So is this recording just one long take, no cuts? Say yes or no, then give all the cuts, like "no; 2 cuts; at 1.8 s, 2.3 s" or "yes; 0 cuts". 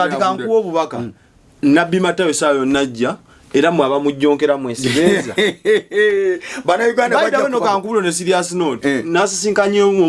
yes; 0 cuts